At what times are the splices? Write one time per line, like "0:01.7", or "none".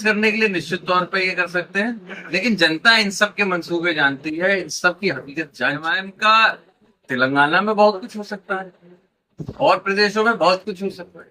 0:06.0

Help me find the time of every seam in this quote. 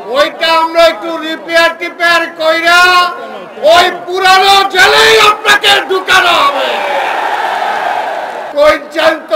0:08.5

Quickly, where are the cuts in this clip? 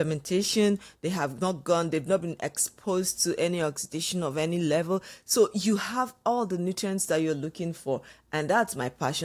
none

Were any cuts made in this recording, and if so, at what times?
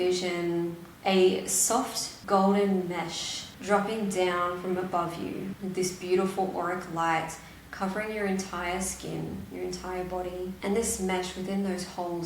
0:05.5
0:10.6

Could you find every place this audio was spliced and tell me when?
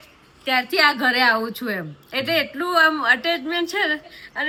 none

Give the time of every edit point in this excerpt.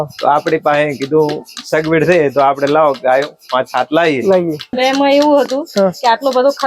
0:04.7

